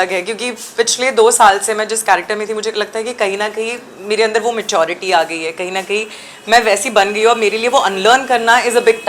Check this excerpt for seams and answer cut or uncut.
uncut